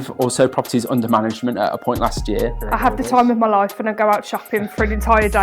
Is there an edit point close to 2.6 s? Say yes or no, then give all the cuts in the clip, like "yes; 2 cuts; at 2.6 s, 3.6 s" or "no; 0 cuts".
yes; 1 cut; at 2.6 s